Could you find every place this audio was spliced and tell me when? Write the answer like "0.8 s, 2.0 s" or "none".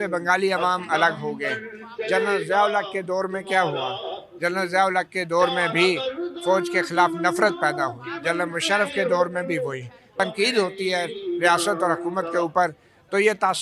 10.1 s